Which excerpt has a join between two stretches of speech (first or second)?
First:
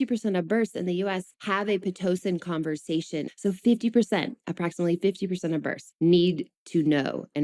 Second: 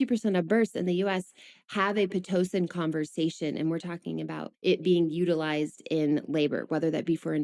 first